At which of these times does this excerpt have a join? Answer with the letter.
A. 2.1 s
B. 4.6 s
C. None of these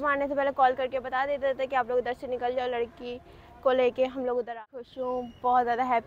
B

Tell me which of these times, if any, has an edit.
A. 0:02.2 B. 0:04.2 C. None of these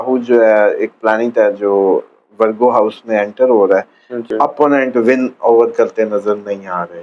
B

